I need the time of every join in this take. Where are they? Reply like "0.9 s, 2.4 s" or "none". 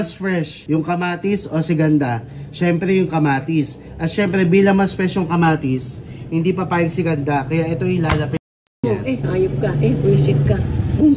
none